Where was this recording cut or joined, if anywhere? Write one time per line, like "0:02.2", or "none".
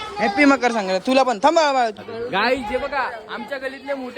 0:02.0